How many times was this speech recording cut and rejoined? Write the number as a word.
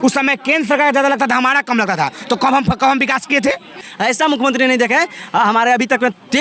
one